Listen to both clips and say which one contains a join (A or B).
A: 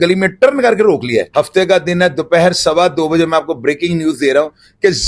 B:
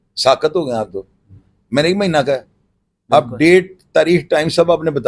A